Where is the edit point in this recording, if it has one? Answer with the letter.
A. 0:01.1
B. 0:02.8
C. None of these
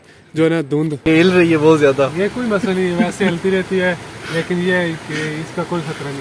A